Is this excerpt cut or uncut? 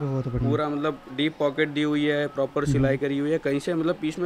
uncut